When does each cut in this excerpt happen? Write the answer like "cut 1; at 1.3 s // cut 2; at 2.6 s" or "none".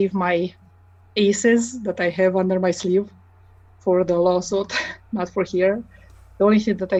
none